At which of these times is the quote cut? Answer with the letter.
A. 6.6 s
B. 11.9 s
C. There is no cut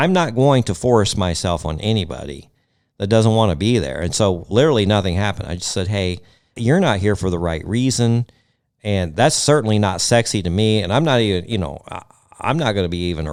C